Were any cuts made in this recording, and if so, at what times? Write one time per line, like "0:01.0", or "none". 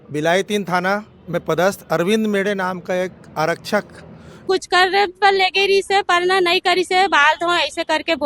0:04.4